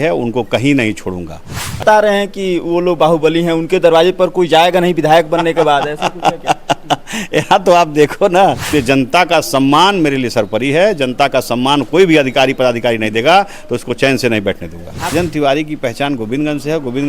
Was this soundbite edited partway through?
yes; 3 cuts; at 1.8 s, 8.6 s, 15.1 s

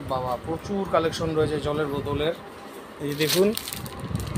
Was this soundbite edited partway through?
no; 0 cuts

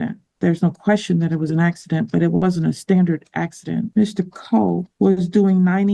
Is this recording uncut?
no; 2 cuts; at 3.9 s, 4.9 s

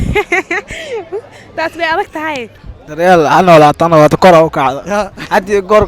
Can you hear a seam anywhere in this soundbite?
yes; 1 cut; at 2.5 s

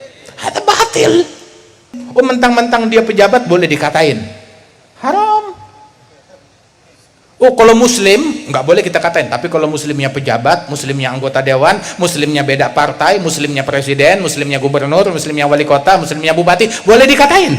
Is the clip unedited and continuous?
no; 1 cut; at 2.0 s

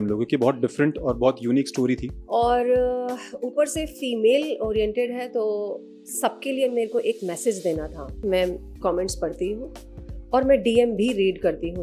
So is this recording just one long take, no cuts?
no; 2 cuts; at 2.1 s, 8.1 s

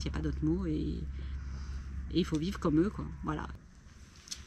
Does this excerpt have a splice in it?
yes; 1 cut; at 3.6 s

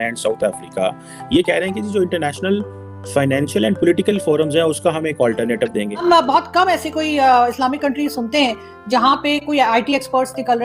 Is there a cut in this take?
yes; 1 cut; at 6.0 s

